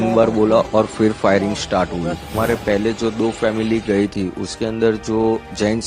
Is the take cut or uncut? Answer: cut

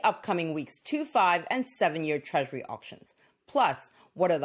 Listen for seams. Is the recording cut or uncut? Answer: cut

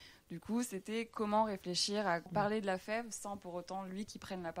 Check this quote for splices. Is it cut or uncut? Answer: cut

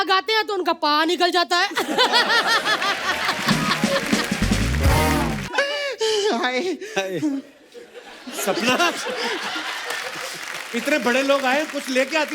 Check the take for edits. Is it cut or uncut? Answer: cut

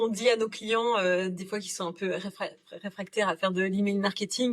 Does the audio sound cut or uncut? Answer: uncut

